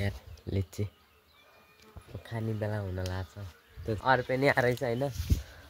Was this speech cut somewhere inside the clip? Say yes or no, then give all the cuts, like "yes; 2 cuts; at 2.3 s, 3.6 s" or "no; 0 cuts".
yes; 1 cut; at 4.0 s